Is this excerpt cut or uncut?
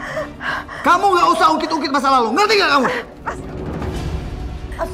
uncut